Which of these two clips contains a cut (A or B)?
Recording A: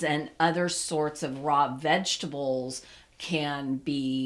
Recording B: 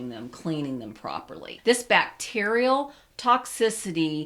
B